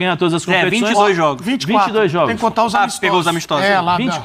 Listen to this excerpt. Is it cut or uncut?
uncut